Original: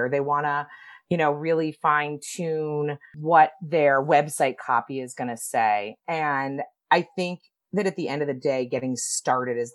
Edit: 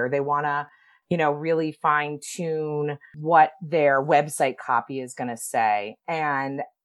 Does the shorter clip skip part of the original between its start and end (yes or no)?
no